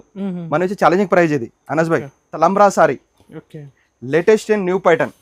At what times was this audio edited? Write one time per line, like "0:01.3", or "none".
0:02.2